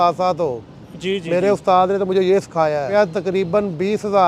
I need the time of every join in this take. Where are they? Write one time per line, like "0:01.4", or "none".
0:02.9